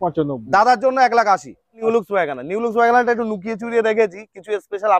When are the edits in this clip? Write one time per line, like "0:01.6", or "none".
0:01.8